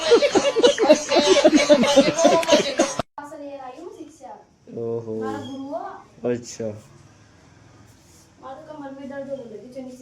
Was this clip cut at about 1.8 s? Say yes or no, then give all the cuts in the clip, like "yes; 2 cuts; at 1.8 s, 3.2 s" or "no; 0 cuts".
no; 0 cuts